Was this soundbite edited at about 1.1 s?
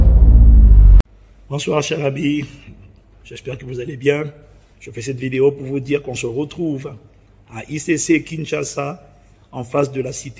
yes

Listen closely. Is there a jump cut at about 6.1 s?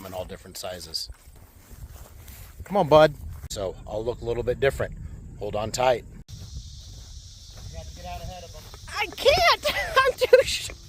yes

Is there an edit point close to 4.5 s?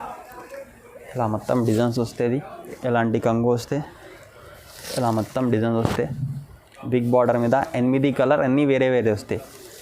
no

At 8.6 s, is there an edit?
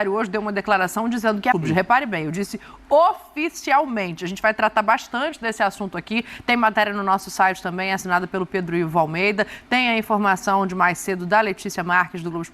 no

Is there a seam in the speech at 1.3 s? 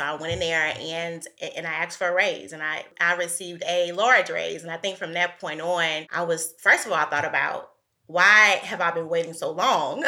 no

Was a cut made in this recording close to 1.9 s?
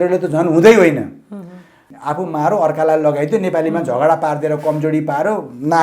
yes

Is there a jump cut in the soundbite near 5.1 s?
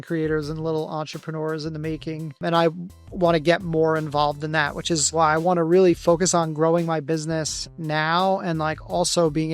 yes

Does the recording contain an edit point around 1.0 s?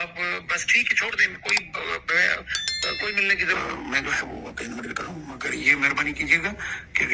no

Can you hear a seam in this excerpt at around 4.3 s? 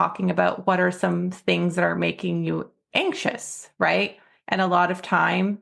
no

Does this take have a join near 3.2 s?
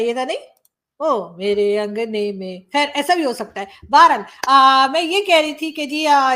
no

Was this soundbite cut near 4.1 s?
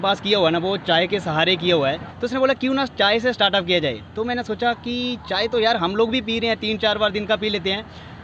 no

